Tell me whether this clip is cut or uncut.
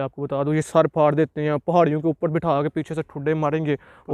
uncut